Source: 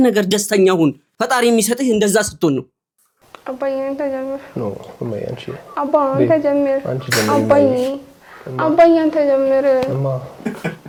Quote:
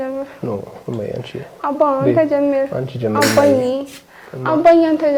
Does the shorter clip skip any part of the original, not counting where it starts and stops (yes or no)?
no